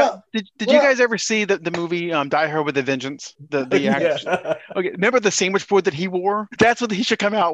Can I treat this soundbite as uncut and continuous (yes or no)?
no